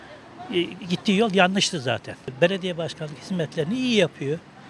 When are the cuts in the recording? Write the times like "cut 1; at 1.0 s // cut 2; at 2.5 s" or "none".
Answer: cut 1; at 2.1 s

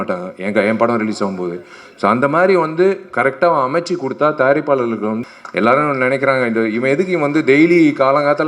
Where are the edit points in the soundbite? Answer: cut 1; at 5.2 s

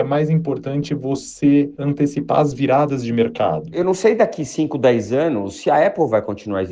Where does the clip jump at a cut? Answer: cut 1; at 3.7 s

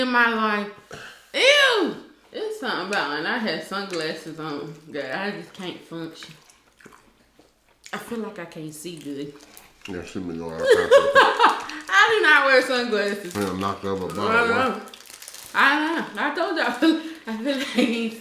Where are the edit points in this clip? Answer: cut 1; at 2.2 s

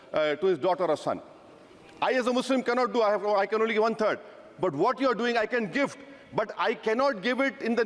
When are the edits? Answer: none

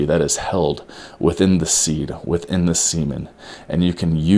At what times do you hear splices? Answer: none

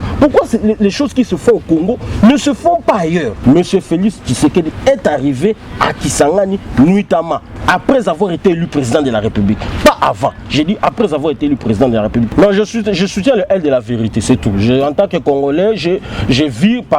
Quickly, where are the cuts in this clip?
cut 1; at 3.3 s // cut 2; at 12.3 s

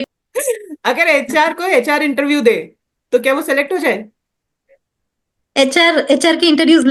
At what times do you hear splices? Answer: none

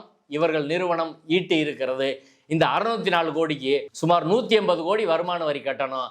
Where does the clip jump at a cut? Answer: cut 1; at 3.9 s

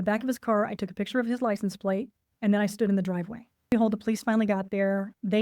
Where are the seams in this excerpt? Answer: cut 1; at 3.7 s

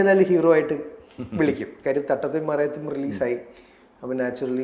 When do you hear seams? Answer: none

